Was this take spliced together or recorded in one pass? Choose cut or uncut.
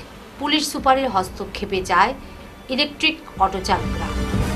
uncut